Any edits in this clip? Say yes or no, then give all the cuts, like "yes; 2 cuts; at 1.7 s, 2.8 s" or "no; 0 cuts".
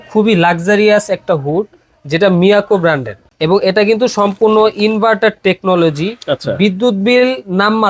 yes; 1 cut; at 3.2 s